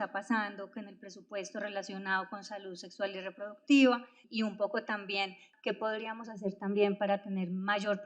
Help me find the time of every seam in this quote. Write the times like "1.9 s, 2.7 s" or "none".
4.2 s, 5.4 s